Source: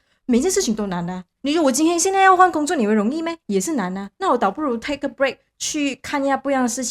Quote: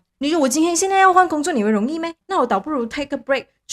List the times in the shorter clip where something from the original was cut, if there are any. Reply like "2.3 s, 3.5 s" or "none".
2.2 s